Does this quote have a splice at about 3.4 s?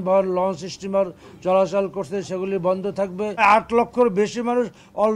yes; 1 cut; at 3.4 s

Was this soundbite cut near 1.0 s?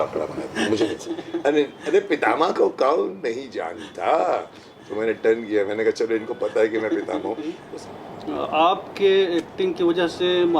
yes; 2 cuts; at 1.0 s, 7.5 s

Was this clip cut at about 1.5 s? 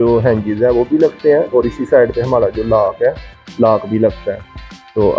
no; 0 cuts

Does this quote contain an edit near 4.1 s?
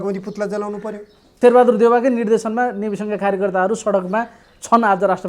no; 1 cut; at 1.2 s

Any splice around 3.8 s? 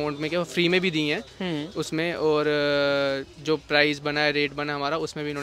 no; 0 cuts

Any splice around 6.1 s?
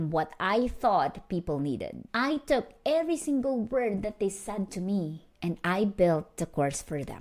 no; 1 cut; at 2.1 s

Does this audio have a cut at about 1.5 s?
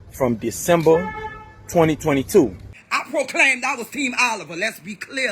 no; 1 cut; at 2.7 s

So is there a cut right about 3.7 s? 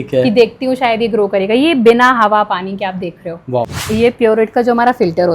yes; 1 cut; at 3.7 s

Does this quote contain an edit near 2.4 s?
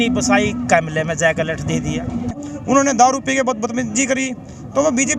yes; 1 cut; at 2.4 s

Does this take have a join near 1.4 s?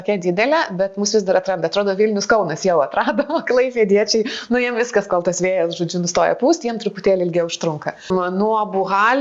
no; 1 cut; at 8.1 s

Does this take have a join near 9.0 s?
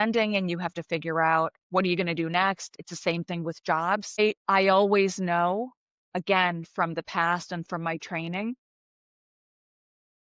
no; 3 cuts; at 1.6 s, 2.7 s, 4.2 s

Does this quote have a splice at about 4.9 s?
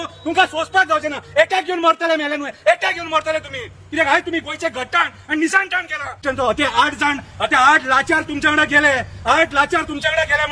no; 1 cut; at 6.1 s

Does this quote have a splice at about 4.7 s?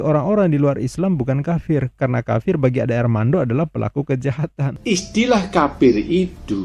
yes; 1 cut; at 4.7 s

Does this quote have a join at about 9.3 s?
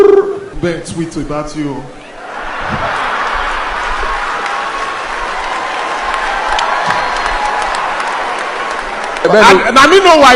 yes; 1 cut; at 9.3 s

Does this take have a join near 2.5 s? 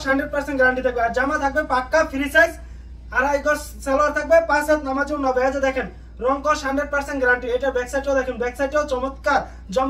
no; 0 cuts

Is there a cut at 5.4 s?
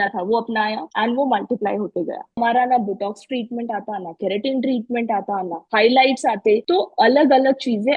no; 3 cuts; at 0.8 s, 2.4 s, 6.6 s

